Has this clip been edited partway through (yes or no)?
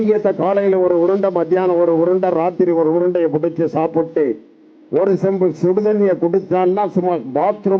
no